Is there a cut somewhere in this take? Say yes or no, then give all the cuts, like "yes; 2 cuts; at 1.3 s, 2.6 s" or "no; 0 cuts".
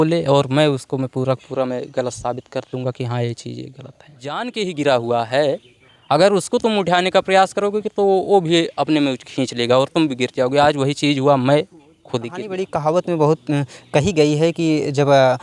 yes; 2 cuts; at 4.4 s, 12.6 s